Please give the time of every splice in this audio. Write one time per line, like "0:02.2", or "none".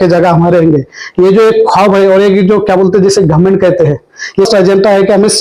0:04.5